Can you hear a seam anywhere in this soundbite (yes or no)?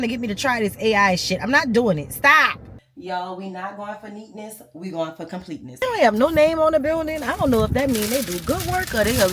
yes